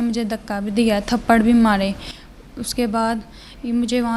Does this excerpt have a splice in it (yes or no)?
no